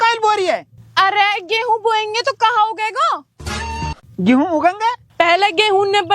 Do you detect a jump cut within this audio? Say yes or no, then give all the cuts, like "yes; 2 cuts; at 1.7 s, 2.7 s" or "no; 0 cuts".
yes; 1 cut; at 5.1 s